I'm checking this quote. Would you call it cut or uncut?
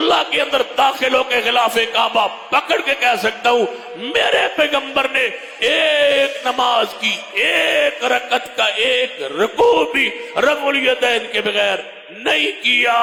uncut